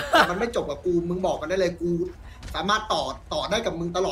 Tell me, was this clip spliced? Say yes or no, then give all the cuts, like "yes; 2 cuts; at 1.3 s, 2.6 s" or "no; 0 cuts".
no; 0 cuts